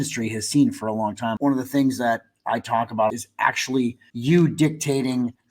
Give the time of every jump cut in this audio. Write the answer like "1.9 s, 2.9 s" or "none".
1.3 s, 3.1 s, 4.1 s